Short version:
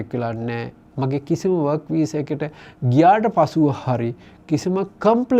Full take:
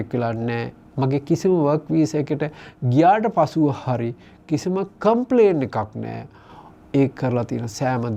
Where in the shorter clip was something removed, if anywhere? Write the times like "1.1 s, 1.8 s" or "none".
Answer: none